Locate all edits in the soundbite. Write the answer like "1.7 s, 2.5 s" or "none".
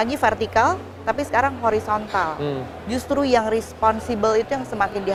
none